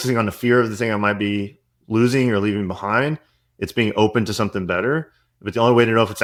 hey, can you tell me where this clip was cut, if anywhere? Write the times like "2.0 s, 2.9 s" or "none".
none